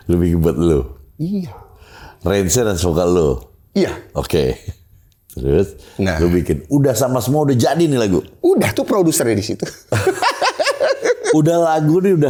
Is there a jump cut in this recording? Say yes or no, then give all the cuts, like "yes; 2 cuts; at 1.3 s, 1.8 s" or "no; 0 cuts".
no; 0 cuts